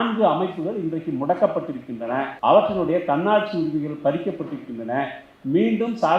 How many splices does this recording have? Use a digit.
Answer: 1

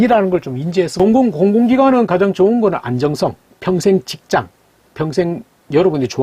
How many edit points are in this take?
1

